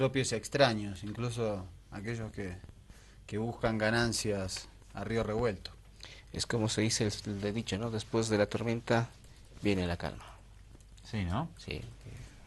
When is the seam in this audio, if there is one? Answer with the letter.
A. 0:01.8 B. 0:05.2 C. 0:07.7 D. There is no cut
C